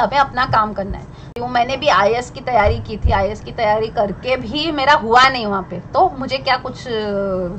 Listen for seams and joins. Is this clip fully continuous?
no; 1 cut; at 1.4 s

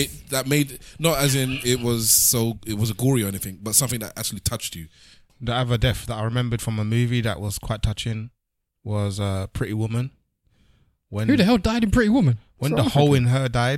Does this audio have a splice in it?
yes; 1 cut; at 5.2 s

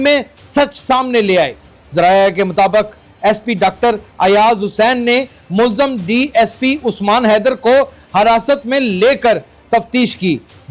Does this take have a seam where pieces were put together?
no; 0 cuts

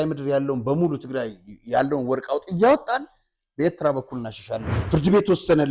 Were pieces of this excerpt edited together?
yes; 1 cut; at 4.7 s

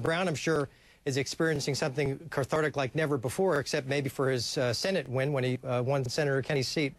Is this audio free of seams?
yes; 0 cuts

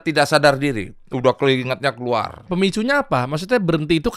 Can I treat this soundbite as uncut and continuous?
no; 1 cut; at 2.5 s

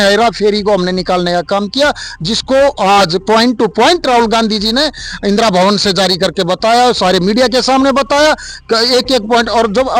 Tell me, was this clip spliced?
no; 0 cuts

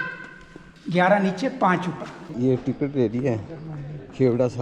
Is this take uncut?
no; 1 cut; at 2.2 s

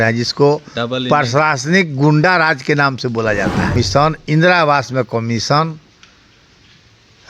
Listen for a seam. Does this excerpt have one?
yes; 1 cut; at 3.7 s

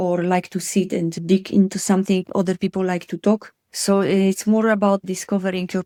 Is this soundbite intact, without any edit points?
yes; 0 cuts

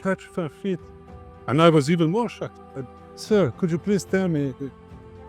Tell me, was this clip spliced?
yes; 1 cut; at 3.0 s

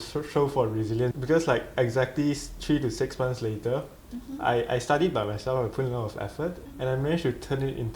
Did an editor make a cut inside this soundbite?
yes; 2 cuts; at 1.1 s, 6.6 s

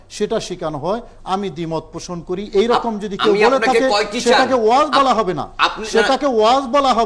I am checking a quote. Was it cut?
no; 0 cuts

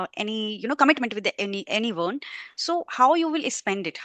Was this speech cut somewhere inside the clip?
no; 0 cuts

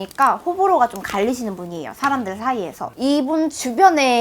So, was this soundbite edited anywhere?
no; 0 cuts

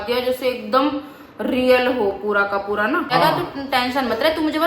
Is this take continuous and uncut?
no; 1 cut; at 3.1 s

